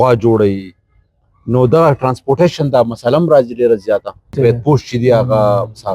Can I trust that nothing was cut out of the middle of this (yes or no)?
no